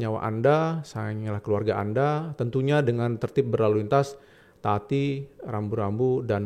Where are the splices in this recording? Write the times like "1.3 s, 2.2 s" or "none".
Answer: none

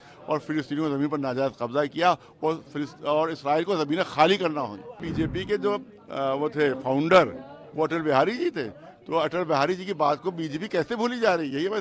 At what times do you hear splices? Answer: 5.0 s

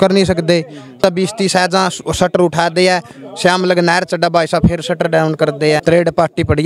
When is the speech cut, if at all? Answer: 1.0 s, 5.8 s

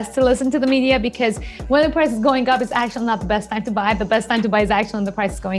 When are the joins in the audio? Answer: none

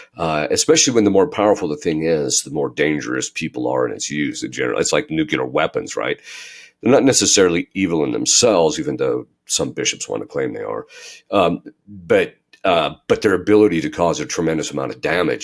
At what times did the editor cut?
none

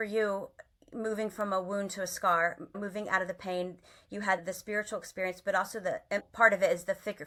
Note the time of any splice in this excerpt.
none

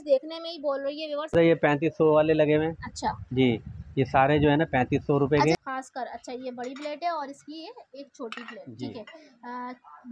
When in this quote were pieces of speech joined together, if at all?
1.3 s, 5.6 s

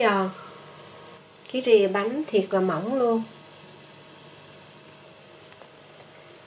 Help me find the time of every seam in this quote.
2.3 s

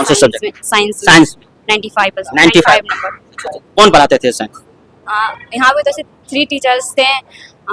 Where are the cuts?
none

